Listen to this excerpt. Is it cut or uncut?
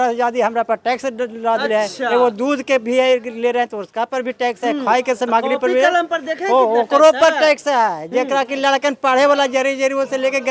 uncut